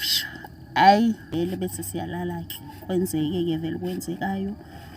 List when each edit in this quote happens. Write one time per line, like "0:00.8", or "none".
0:01.3